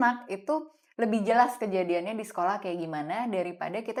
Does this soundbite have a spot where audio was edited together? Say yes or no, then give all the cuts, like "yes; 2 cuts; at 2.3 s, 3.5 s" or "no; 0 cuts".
no; 0 cuts